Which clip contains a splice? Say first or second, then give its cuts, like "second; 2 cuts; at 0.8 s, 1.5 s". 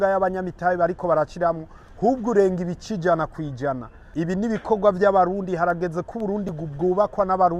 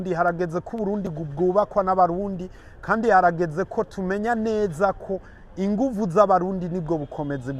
first; 1 cut; at 3.9 s